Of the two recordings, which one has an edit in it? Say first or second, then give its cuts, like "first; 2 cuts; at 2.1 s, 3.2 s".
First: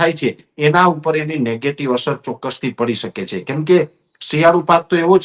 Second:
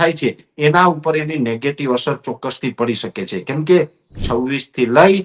second; 1 cut; at 4.1 s